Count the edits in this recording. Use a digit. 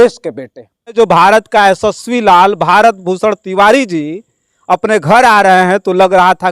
1